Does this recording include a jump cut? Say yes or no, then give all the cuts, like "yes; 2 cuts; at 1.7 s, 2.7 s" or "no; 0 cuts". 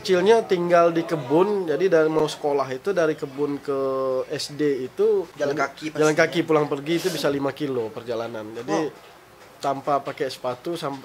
yes; 1 cut; at 5.3 s